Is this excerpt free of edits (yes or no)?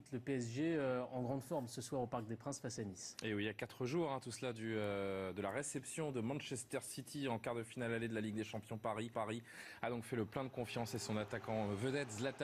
no